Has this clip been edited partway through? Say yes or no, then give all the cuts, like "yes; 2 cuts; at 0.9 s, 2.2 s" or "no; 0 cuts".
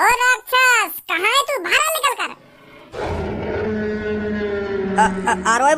no; 0 cuts